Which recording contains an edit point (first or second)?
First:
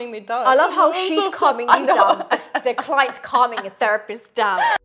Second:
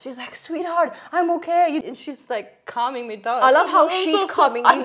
second